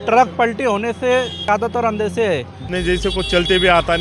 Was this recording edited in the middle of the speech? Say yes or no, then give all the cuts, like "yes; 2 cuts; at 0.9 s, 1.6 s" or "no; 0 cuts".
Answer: yes; 2 cuts; at 1.5 s, 2.6 s